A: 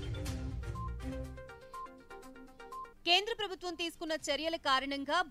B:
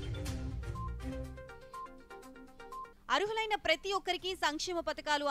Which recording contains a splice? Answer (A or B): A